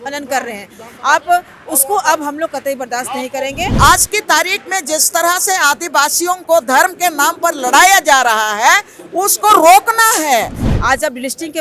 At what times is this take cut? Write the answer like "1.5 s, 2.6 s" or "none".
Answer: 3.8 s, 10.6 s